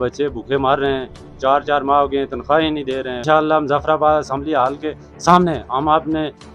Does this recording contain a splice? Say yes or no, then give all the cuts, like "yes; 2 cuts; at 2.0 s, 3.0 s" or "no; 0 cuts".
yes; 1 cut; at 3.2 s